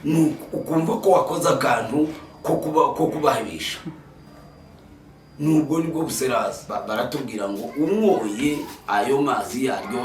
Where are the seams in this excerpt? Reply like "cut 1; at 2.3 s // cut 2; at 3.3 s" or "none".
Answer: cut 1; at 6.7 s